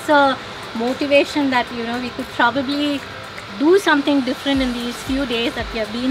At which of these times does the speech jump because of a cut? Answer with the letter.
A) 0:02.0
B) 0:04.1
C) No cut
C